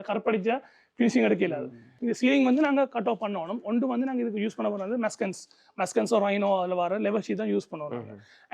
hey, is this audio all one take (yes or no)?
no